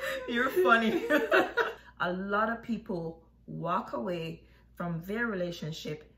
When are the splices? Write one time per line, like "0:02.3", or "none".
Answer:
0:01.8